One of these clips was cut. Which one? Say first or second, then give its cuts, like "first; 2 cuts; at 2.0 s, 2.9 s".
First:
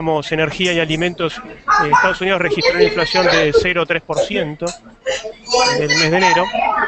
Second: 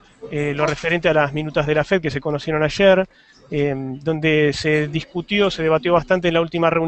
first; 1 cut; at 5.1 s